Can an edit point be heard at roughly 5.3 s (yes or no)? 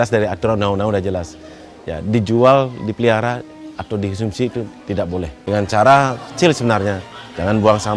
yes